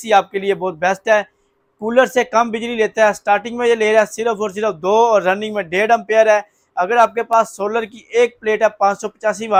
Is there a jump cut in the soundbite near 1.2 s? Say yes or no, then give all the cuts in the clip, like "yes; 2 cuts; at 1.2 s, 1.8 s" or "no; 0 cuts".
no; 0 cuts